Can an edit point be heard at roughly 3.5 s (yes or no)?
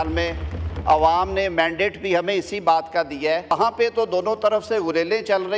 yes